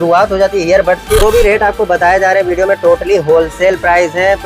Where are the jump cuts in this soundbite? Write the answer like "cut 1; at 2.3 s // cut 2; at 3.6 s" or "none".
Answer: cut 1; at 1.2 s